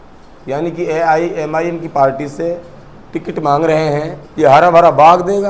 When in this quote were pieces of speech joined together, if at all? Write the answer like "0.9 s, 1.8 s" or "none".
4.2 s